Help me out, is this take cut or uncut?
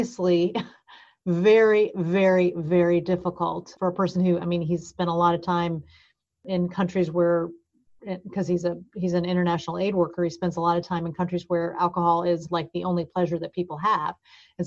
cut